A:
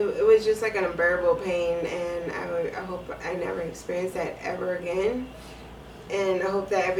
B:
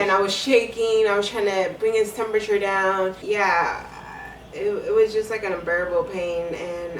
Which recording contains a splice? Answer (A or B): B